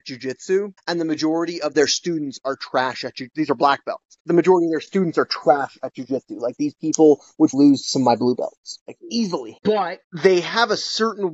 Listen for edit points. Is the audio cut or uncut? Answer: cut